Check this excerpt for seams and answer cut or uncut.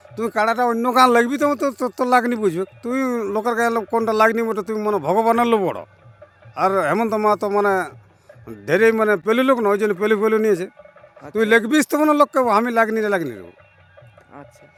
uncut